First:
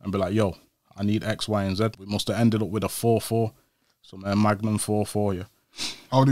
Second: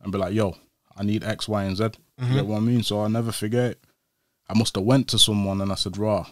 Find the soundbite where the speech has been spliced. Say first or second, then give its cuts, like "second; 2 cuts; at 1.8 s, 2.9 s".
first; 1 cut; at 2.0 s